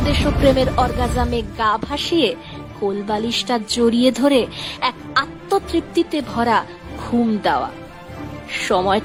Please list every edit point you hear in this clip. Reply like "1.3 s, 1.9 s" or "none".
none